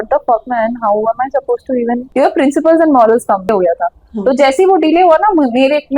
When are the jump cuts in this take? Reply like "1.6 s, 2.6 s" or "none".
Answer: 2.1 s, 3.5 s